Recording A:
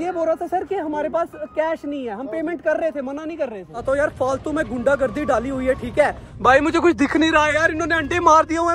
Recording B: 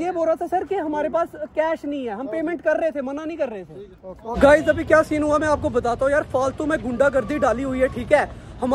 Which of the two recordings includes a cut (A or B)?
A